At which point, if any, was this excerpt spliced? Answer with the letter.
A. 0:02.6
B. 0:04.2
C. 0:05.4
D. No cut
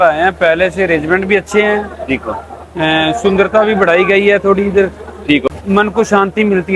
C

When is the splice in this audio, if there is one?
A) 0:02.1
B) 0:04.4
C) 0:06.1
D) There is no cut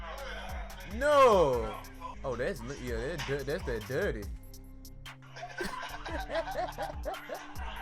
A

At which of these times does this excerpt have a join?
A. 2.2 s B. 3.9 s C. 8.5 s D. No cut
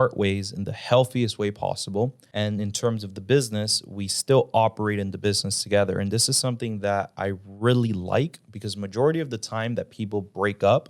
A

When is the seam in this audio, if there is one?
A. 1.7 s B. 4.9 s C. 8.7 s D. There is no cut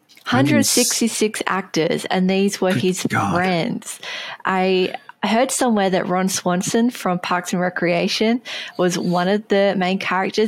D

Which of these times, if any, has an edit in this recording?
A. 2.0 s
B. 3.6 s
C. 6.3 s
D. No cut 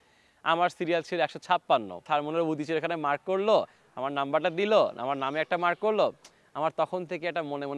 A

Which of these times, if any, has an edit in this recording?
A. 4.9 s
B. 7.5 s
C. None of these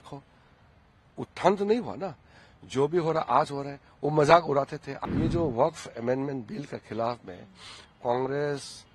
A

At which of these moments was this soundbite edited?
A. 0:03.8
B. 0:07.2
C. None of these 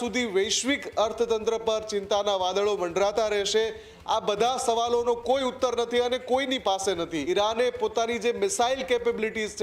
B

